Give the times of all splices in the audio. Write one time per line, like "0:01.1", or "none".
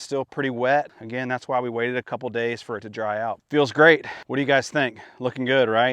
0:01.0
0:03.4
0:04.2